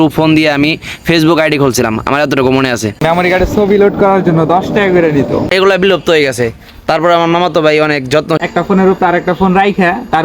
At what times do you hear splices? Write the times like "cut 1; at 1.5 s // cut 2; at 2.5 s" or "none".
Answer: cut 1; at 3.0 s // cut 2; at 5.5 s // cut 3; at 8.4 s